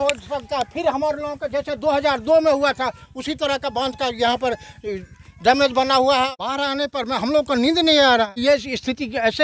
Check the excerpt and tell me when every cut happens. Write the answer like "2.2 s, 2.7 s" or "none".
6.3 s, 8.3 s